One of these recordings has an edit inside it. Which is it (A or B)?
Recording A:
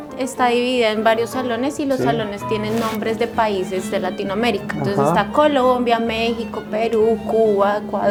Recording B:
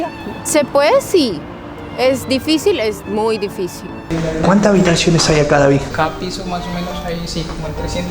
B